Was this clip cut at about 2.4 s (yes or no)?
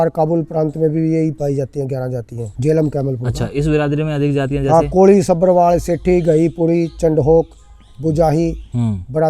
yes